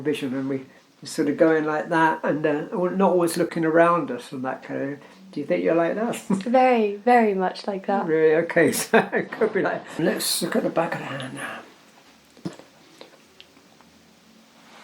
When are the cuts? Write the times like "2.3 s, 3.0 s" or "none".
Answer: 10.0 s, 13.9 s